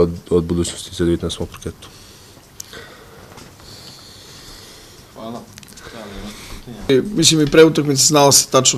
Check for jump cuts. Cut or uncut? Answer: uncut